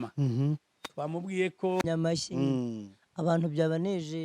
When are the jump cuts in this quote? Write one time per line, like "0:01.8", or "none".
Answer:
0:01.9